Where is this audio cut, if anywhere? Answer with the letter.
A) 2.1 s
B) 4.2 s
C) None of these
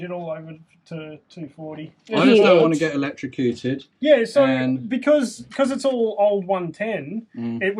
A